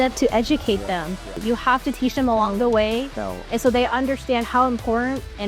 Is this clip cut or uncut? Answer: cut